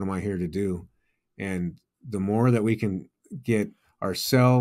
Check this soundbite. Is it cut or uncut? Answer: uncut